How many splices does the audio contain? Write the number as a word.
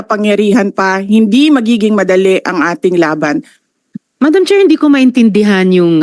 one